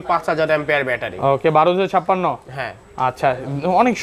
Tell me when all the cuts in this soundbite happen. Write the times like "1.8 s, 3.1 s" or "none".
none